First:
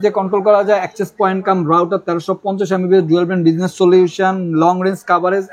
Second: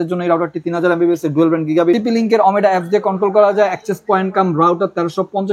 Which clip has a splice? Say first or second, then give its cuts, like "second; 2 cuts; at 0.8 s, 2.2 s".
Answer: second; 1 cut; at 2.0 s